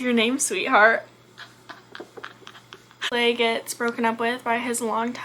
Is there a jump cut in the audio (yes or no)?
yes